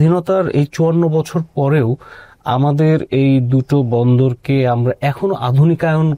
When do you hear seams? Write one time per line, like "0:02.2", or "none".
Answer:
none

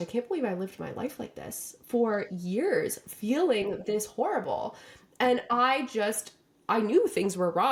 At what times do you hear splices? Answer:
none

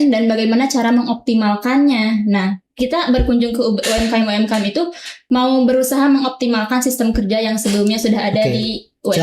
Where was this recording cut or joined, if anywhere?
0:05.1

